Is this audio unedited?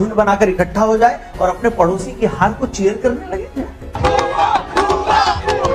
yes; 0 cuts

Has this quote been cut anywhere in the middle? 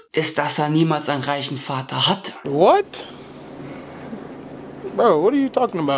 yes; 1 cut; at 2.3 s

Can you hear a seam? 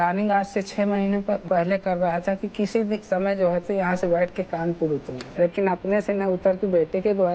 yes; 2 cuts; at 1.4 s, 5.2 s

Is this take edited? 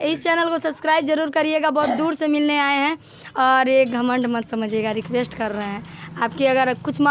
no; 0 cuts

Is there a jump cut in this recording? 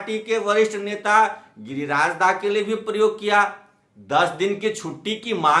no; 0 cuts

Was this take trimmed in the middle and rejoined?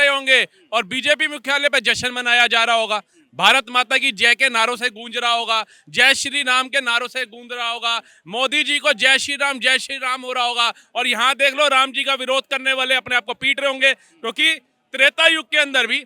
no; 0 cuts

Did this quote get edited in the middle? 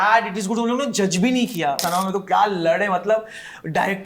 yes; 1 cut; at 1.8 s

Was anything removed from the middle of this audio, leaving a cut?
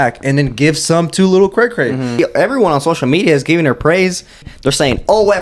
yes; 2 cuts; at 2.1 s, 4.4 s

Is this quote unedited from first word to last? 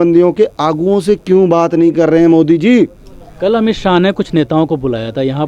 yes; 0 cuts

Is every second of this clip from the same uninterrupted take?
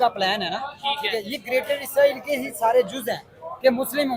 yes; 0 cuts

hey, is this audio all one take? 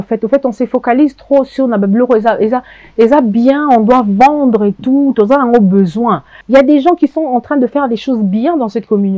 no; 1 cut; at 6.3 s

